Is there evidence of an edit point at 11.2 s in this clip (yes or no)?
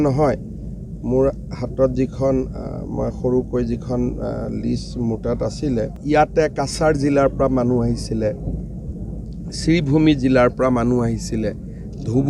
no